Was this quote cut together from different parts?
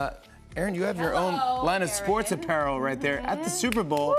no; 0 cuts

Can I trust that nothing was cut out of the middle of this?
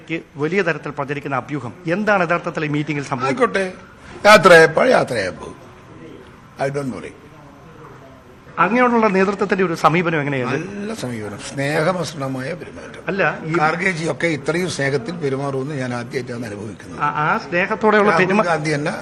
yes; 0 cuts

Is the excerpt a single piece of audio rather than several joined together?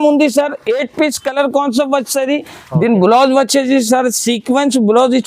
no; 1 cut; at 2.6 s

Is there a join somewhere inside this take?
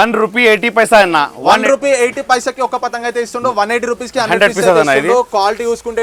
no; 0 cuts

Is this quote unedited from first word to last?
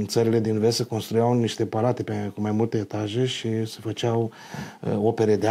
yes; 0 cuts

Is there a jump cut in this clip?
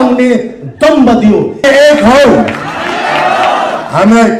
yes; 1 cut; at 1.5 s

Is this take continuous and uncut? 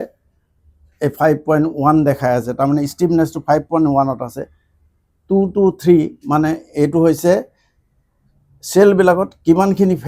yes; 0 cuts

